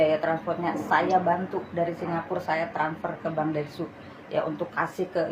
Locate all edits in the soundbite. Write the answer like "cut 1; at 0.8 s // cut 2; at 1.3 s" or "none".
none